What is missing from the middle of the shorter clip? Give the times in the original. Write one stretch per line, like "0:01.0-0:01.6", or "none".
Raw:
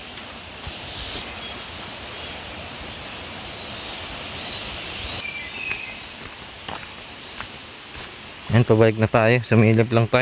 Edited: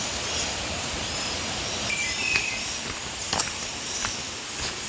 0:03.8-0:05.3